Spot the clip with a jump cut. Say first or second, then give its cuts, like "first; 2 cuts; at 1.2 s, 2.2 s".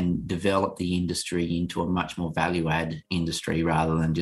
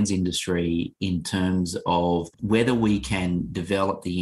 second; 1 cut; at 2.3 s